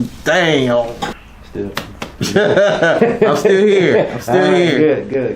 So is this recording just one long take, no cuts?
no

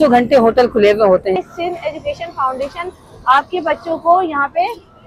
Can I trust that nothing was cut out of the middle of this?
no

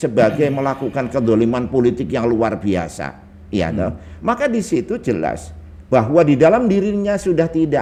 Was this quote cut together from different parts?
no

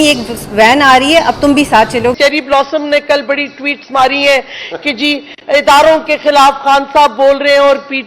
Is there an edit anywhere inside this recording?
yes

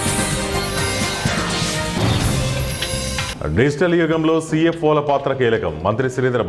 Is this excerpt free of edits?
no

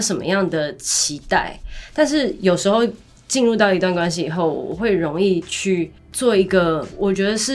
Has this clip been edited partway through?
no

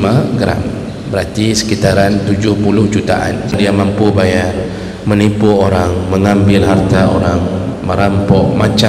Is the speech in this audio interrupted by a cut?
yes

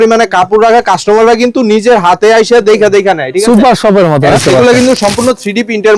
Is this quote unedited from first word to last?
no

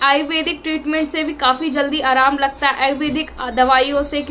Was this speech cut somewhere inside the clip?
no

